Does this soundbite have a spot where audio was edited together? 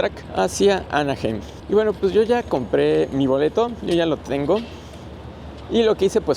no; 0 cuts

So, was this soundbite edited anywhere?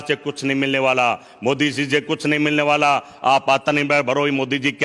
no; 0 cuts

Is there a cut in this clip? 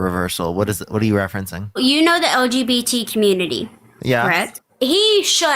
yes; 2 cuts; at 1.8 s, 4.6 s

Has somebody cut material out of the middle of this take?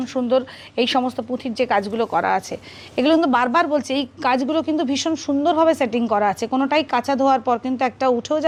no; 0 cuts

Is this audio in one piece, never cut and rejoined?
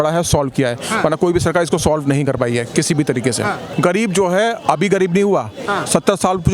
no; 1 cut; at 3.7 s

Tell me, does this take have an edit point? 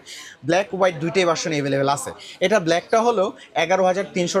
no; 0 cuts

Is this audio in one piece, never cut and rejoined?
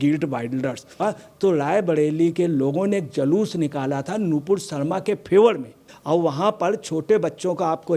no; 2 cuts; at 0.9 s, 5.9 s

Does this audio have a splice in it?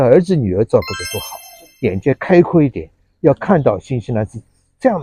yes; 1 cut; at 1.6 s

